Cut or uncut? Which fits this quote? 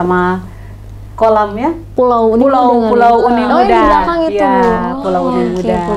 uncut